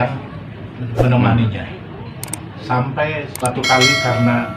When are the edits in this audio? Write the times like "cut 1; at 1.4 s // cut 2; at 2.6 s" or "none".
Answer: cut 1; at 3.4 s